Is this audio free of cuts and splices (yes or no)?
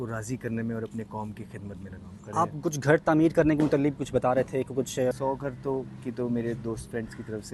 no